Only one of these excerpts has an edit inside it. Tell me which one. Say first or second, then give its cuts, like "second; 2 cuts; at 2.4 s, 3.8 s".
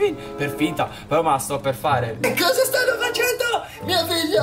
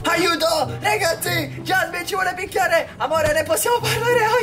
first; 1 cut; at 2.2 s